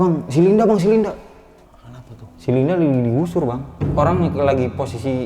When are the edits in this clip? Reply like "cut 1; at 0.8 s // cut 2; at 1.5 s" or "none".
cut 1; at 3.8 s